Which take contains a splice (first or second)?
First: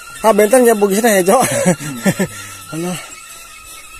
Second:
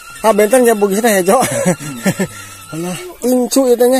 second